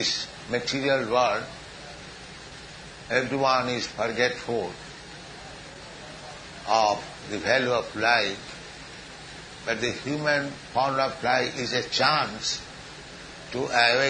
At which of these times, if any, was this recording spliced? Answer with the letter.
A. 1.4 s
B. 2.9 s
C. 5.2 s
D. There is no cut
D